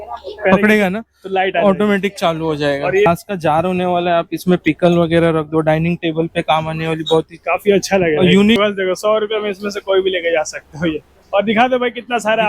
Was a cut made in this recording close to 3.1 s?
yes; 2 cuts; at 3.1 s, 8.6 s

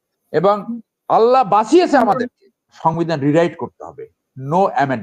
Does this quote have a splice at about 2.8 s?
yes; 1 cut; at 2.8 s

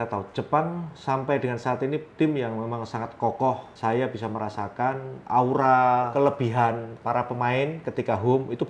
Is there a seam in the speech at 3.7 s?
yes; 2 cuts; at 3.7 s, 6.1 s

